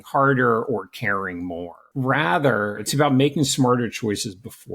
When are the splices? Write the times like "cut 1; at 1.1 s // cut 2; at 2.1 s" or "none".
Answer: cut 1; at 1.8 s // cut 2; at 2.8 s